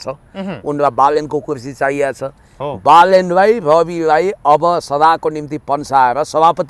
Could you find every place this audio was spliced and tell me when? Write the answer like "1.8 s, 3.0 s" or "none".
none